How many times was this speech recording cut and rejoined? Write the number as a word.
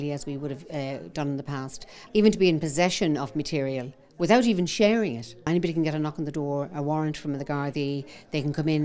two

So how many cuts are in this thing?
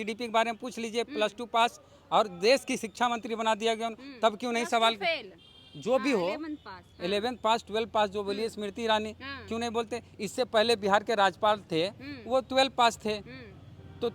zero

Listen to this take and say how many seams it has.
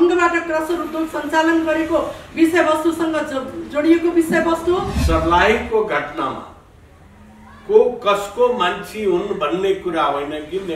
one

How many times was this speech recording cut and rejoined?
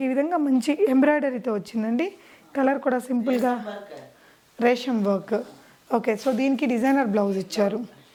zero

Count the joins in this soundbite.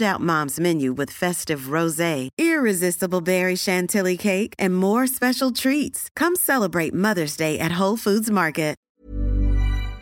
one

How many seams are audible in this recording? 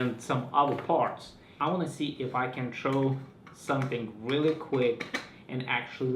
one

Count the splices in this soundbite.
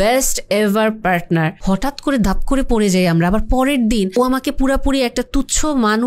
two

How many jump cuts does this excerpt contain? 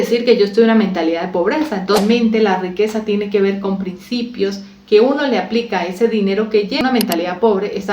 two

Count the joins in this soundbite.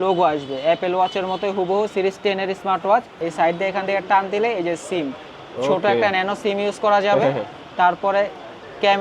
one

